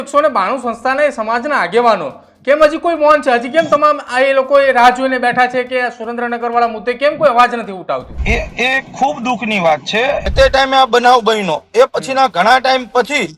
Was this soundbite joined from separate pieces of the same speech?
yes; 2 cuts; at 8.1 s, 10.2 s

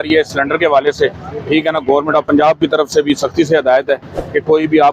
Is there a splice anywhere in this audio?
no; 0 cuts

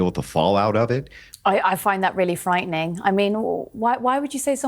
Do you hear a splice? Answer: yes; 1 cut; at 1.2 s

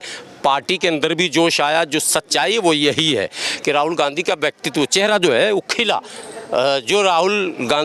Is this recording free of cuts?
yes; 0 cuts

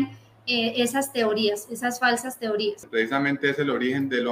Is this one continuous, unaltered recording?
no; 1 cut; at 2.8 s

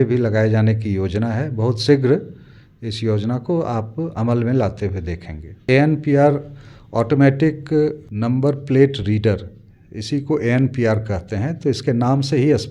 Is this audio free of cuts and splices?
no; 2 cuts; at 5.6 s, 8.1 s

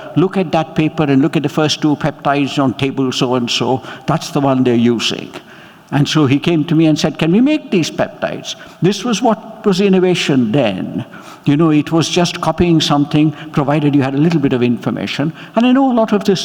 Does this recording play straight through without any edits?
yes; 0 cuts

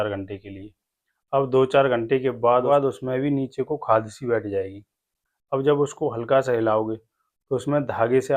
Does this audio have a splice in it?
yes; 1 cut; at 2.7 s

